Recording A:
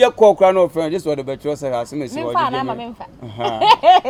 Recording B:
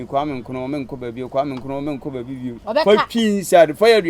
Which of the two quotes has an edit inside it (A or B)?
B